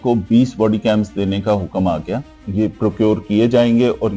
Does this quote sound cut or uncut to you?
uncut